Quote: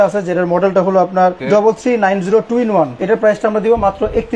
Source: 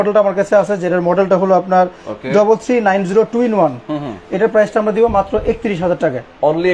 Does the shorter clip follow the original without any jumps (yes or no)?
no